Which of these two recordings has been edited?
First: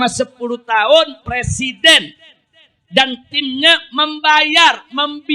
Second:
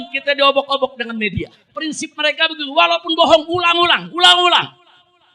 second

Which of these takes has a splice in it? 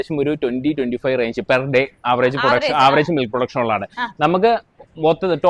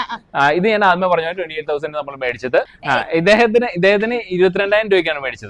second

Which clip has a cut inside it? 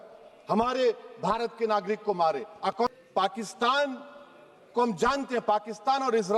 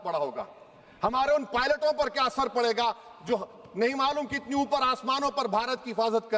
first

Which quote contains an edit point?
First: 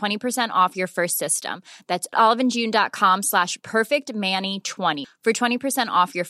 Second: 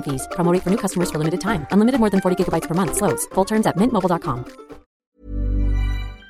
second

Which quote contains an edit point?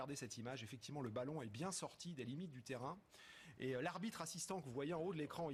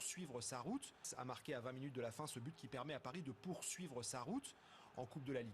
second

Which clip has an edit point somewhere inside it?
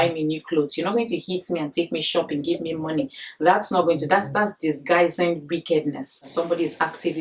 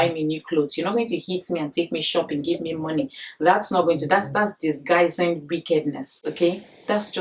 first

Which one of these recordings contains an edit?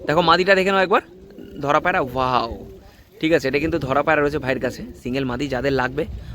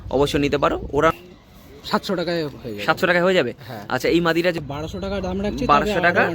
second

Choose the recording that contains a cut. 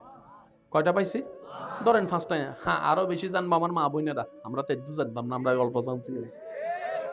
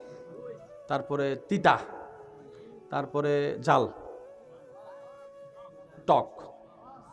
second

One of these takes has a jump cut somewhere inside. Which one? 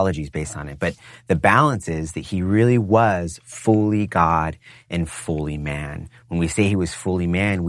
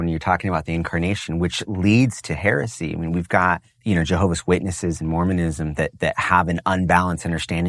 second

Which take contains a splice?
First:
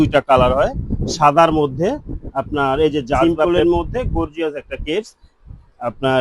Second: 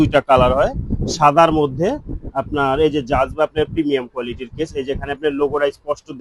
first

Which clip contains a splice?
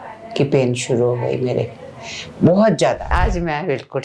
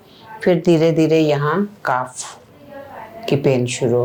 first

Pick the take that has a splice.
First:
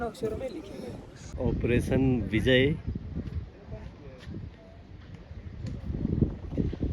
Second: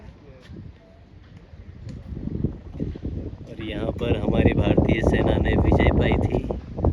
first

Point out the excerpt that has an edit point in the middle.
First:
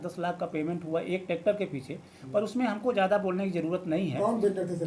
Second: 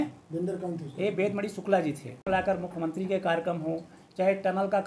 second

